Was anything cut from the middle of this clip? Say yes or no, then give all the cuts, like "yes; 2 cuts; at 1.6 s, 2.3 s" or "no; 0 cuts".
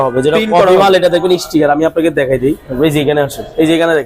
yes; 1 cut; at 2.7 s